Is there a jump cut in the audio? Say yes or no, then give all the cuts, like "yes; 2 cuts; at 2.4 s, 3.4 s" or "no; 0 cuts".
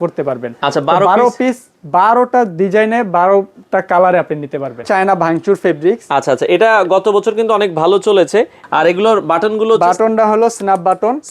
yes; 2 cuts; at 4.9 s, 8.6 s